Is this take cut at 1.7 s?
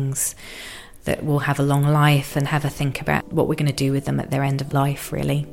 no; 2 cuts; at 3.3 s, 4.6 s

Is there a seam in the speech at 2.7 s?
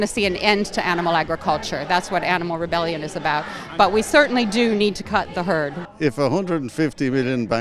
no; 1 cut; at 5.8 s

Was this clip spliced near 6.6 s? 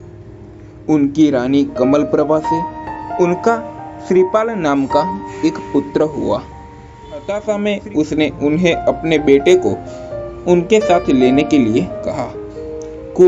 yes; 1 cut; at 6.6 s

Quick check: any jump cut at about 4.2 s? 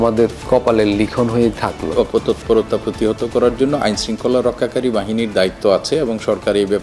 no; 1 cut; at 1.9 s

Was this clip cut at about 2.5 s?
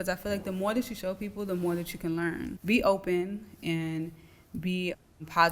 yes; 1 cut; at 2.5 s

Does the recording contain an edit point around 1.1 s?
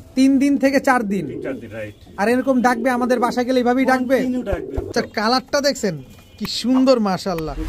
no; 1 cut; at 4.9 s

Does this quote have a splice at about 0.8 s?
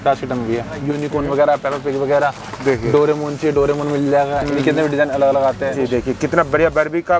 yes; 2 cuts; at 0.8 s, 5.8 s

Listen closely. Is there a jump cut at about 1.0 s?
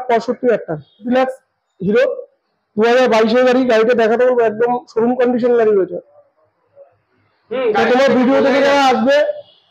yes; 1 cut; at 1.0 s

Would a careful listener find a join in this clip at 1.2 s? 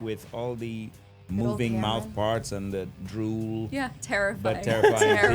no; 1 cut; at 3.7 s

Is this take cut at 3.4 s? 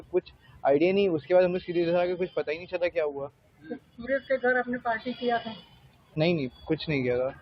no; 0 cuts

